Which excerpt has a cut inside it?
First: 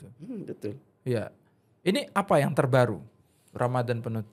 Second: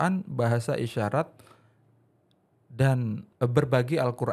second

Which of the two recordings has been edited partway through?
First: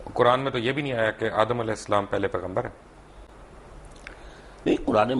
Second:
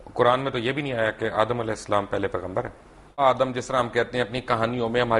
second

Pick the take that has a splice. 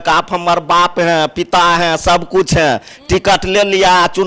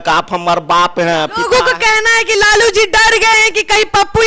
second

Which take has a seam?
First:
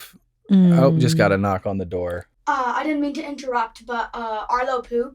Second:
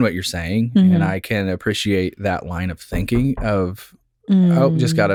first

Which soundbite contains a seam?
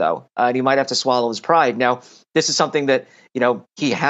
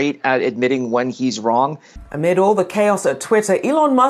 second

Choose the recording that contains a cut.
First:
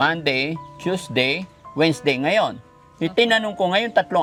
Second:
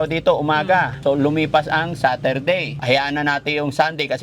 second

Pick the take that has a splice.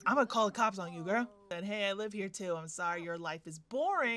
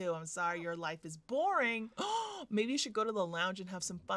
first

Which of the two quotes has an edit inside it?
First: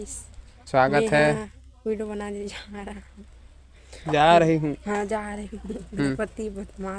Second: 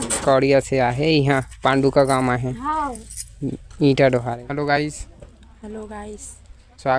second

